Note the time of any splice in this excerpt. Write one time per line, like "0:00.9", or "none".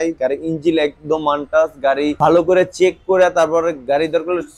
0:02.1